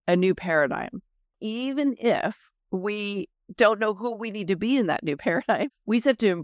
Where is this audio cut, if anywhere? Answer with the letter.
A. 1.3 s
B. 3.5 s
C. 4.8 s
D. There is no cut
A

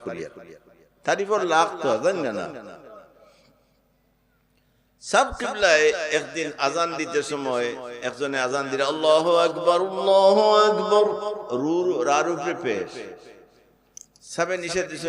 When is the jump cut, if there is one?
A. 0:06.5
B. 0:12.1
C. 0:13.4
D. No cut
D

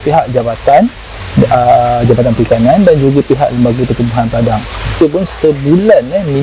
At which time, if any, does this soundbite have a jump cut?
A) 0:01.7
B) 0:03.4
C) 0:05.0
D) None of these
C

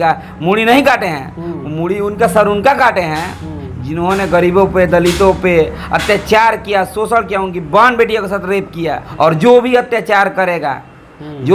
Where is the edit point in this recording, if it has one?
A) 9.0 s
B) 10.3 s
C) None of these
A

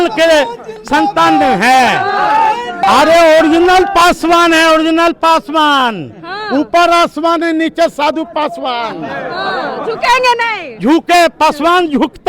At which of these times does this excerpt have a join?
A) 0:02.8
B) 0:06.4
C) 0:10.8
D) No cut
A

